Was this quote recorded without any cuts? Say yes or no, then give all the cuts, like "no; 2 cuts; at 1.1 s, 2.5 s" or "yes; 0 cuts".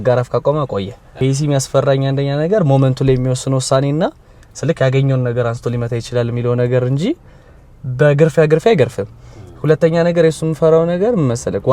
no; 1 cut; at 1.0 s